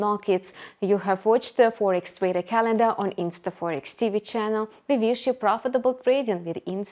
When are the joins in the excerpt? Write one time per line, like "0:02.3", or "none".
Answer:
none